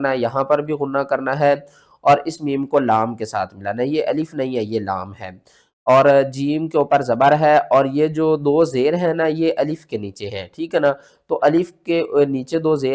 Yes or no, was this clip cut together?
no